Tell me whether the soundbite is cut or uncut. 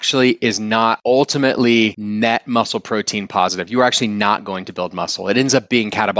cut